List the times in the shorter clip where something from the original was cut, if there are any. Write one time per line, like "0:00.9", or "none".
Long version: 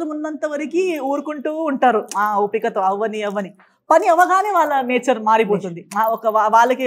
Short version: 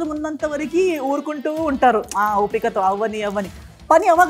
none

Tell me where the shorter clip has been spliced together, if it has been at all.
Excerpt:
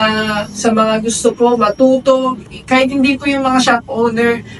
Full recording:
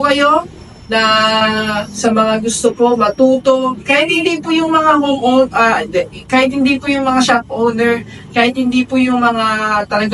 0:02.4

